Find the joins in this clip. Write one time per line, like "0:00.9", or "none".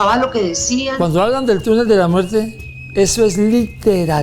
0:00.9

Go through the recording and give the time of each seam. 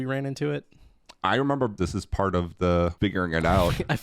0:01.7
0:02.9

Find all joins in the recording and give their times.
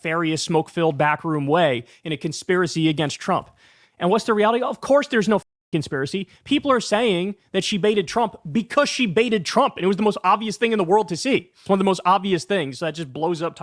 0:11.6

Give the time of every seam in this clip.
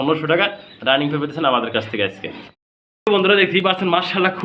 none

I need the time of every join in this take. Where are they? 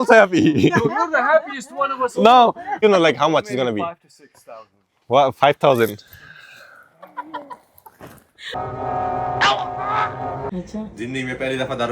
0:02.8
0:08.6
0:10.5

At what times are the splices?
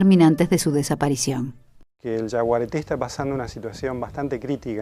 0:03.1

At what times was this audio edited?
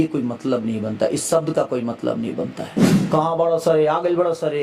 0:02.9

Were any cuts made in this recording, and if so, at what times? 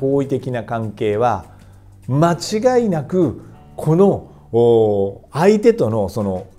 none

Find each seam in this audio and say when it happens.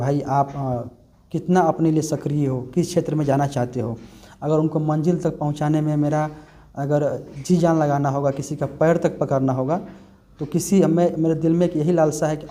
none

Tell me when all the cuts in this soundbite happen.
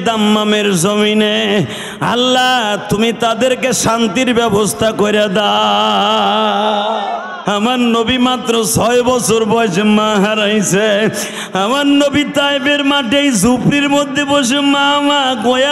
0:07.3

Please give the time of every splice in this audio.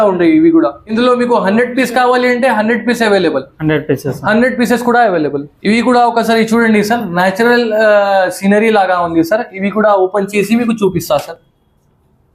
none

